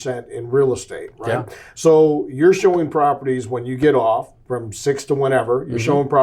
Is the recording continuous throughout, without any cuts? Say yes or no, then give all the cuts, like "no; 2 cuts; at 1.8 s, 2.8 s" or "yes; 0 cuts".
yes; 0 cuts